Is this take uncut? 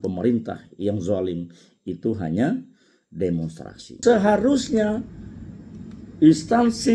no; 1 cut; at 3.9 s

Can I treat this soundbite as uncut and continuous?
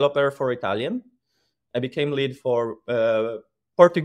yes; 0 cuts

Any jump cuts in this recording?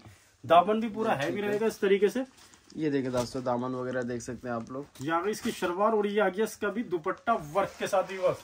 no; 0 cuts

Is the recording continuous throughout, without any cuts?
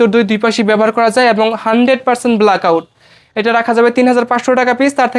yes; 0 cuts

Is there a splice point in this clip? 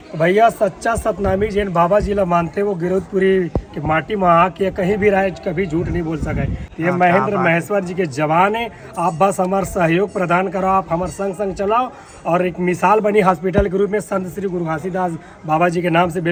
no; 0 cuts

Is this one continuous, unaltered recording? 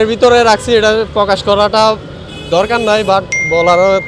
yes; 0 cuts

